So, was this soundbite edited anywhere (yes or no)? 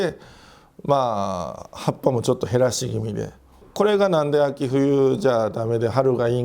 yes